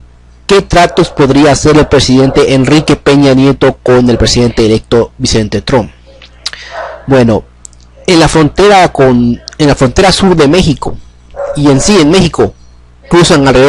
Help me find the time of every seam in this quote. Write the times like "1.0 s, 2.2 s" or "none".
8.1 s